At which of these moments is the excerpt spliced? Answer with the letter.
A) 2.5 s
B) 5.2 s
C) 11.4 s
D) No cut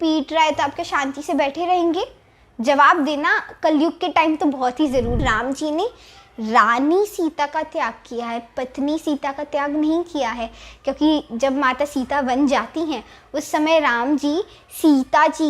B